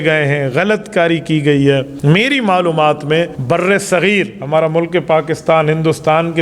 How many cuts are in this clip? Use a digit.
2